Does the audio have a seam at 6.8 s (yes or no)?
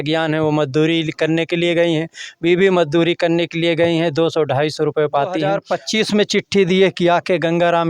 no